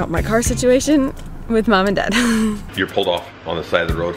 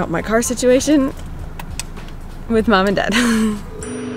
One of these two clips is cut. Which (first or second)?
first